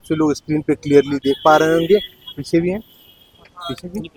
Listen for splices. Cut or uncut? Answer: uncut